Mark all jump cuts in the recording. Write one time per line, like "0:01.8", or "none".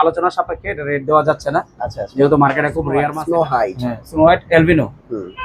0:03.1